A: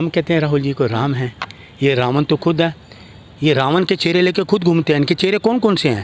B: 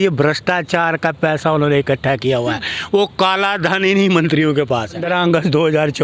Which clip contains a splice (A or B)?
B